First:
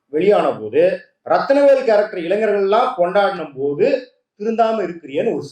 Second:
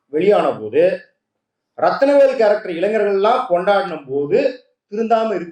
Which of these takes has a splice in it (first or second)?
first